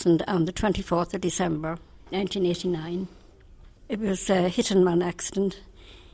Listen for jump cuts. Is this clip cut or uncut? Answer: uncut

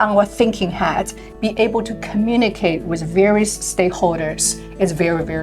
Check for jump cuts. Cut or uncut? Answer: cut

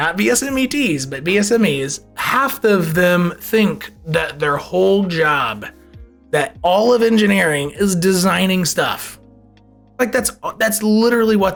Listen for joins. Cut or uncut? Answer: uncut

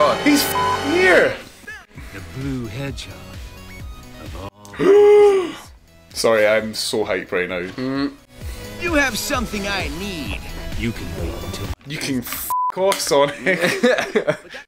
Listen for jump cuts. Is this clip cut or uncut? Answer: uncut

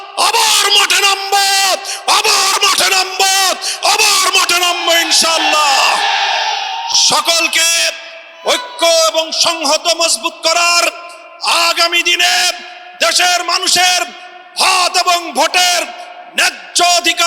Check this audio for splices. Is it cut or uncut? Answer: uncut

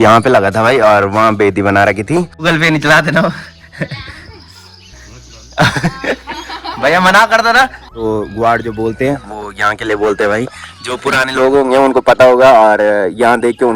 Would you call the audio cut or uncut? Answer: cut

